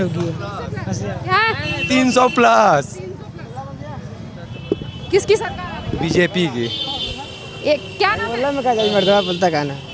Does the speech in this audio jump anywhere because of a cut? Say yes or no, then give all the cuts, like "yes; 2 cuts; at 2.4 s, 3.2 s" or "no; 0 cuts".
no; 0 cuts